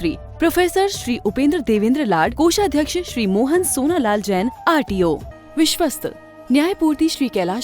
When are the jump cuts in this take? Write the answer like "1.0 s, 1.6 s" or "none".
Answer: 5.3 s